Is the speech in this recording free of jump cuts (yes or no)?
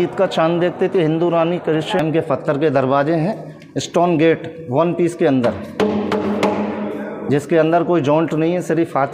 no